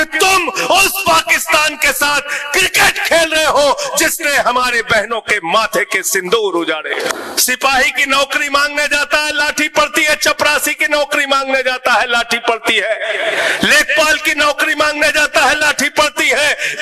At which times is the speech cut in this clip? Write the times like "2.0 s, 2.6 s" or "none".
7.1 s

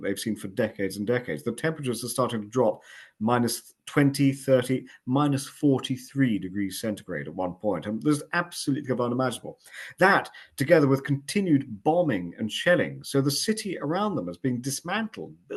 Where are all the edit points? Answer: none

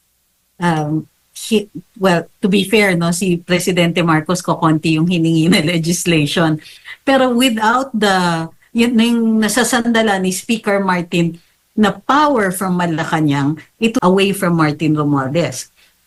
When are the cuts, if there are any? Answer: 14.0 s

